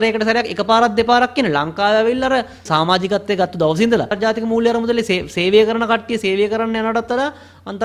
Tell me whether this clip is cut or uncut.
cut